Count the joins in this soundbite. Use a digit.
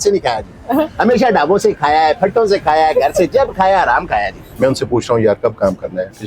1